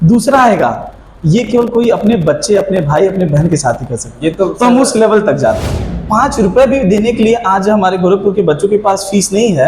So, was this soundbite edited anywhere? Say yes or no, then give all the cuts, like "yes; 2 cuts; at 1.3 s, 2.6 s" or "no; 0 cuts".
yes; 1 cut; at 5.7 s